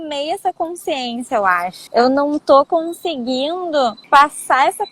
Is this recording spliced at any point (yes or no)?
yes